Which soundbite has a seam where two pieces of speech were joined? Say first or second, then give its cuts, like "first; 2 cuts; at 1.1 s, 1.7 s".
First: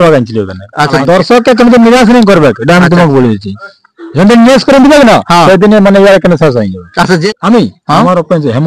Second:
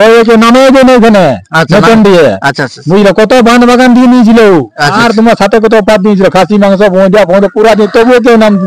first; 2 cuts; at 1.0 s, 7.3 s